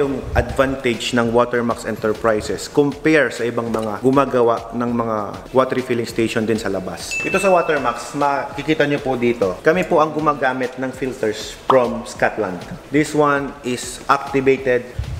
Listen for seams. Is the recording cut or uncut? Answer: uncut